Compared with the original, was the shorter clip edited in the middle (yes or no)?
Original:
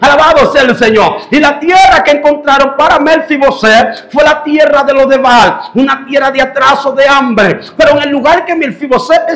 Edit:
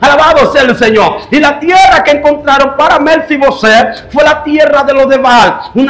no